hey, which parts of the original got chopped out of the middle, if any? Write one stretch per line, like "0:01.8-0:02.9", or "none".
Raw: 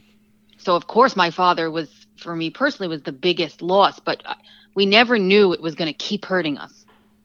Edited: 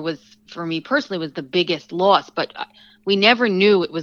none